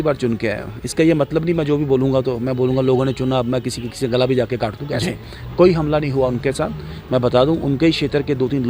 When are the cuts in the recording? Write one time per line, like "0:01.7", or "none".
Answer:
0:05.0